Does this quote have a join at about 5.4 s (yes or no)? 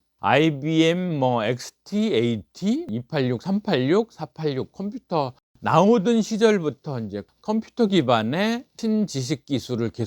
yes